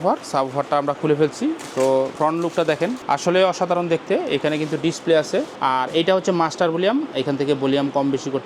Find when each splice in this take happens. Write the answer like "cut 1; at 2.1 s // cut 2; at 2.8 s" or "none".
cut 1; at 2.1 s // cut 2; at 3.0 s // cut 3; at 5.5 s